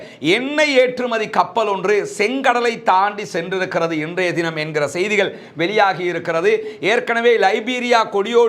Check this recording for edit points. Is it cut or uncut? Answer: uncut